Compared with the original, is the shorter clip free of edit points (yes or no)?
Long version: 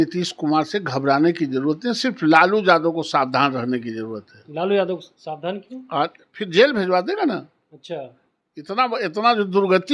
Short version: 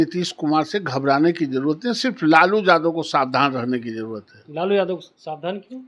yes